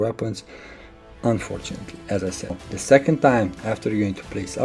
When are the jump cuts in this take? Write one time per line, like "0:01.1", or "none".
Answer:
0:02.7